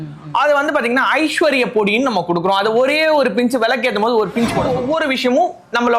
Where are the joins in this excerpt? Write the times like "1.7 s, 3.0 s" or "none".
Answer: 4.7 s